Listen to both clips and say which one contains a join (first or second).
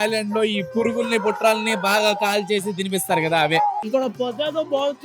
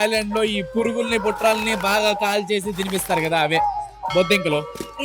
first